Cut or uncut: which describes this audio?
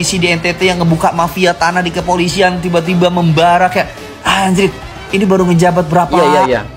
uncut